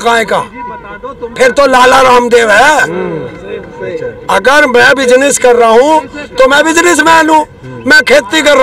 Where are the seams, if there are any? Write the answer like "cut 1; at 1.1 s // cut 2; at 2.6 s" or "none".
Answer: none